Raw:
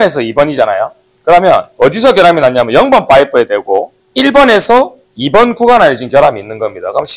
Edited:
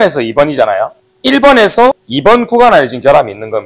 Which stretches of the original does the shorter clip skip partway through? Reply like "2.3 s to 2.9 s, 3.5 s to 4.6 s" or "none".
1.1 s to 4.0 s, 5.0 s to 5.2 s